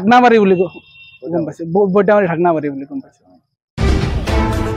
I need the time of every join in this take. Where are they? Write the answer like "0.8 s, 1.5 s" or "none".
3.7 s